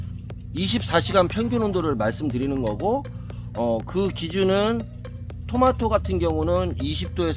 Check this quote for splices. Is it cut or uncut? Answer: uncut